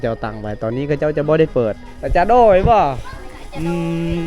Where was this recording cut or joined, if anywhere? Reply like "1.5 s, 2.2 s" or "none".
1.9 s, 3.2 s

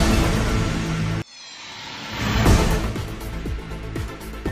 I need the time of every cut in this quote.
3.6 s

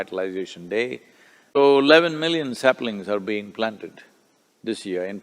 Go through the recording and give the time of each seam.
1.6 s

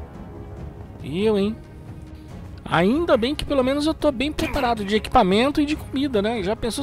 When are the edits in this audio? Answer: 1.0 s

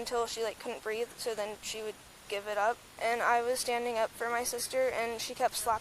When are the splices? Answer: 2.9 s

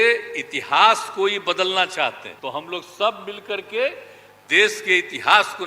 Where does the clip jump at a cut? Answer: 2.3 s

